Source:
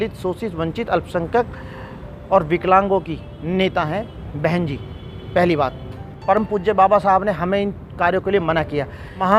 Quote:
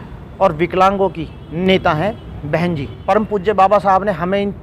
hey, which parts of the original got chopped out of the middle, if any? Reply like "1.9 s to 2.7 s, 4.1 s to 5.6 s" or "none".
4.8 s to 6.1 s